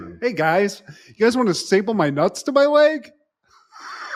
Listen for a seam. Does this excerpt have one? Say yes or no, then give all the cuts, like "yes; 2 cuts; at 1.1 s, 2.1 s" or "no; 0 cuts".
no; 0 cuts